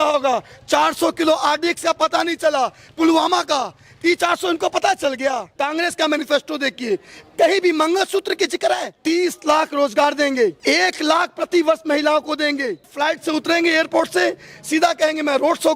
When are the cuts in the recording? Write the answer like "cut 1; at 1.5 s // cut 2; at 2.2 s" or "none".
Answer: cut 1; at 5.5 s // cut 2; at 9.0 s // cut 3; at 10.6 s // cut 4; at 12.9 s